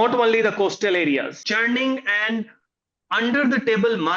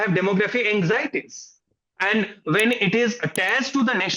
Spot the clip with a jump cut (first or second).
first